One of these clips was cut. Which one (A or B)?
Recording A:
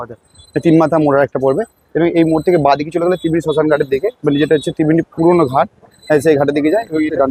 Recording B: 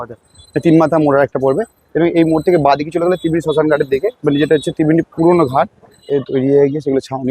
B